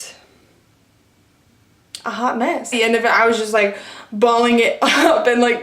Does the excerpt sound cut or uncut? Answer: cut